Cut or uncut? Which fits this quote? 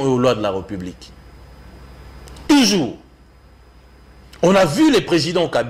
uncut